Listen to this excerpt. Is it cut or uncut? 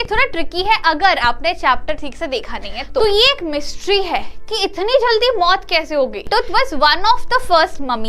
cut